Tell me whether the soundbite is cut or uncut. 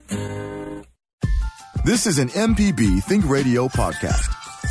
cut